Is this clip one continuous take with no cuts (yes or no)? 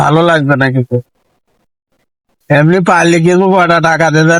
yes